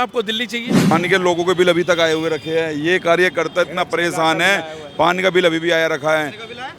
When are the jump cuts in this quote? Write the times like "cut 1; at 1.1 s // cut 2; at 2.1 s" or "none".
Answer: cut 1; at 0.9 s